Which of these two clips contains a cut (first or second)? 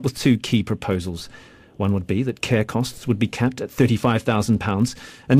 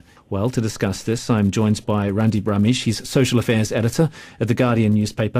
second